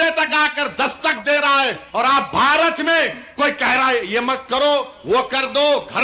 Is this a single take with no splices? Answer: no; 1 cut; at 1.8 s

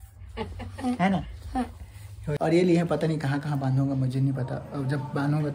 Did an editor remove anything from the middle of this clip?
yes; 1 cut; at 2.3 s

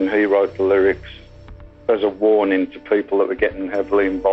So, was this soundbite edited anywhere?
no; 0 cuts

